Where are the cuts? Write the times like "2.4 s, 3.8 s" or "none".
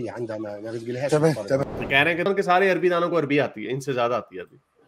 2.3 s